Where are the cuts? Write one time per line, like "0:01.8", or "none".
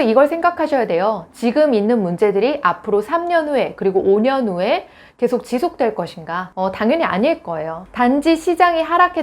0:07.7